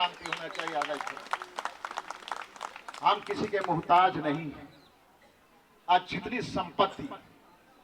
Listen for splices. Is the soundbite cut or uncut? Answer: uncut